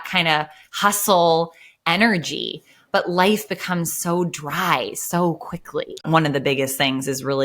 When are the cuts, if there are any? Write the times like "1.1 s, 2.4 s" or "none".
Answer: 6.0 s